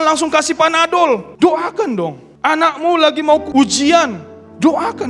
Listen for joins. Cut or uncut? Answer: cut